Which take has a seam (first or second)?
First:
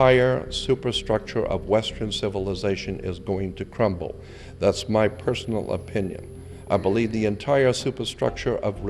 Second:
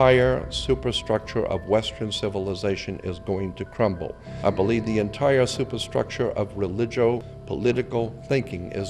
second